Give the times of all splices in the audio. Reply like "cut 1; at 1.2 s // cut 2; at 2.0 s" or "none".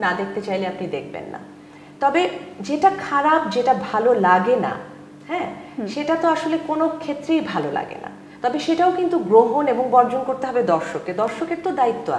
none